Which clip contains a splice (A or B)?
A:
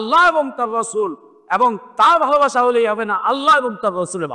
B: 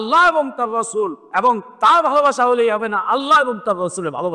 B